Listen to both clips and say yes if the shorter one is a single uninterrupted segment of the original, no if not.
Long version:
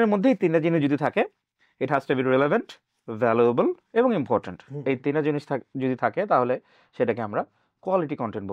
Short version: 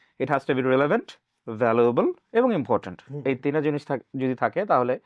yes